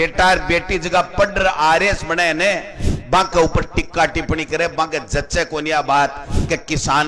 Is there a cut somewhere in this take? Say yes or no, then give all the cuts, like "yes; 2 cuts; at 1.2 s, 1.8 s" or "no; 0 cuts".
no; 0 cuts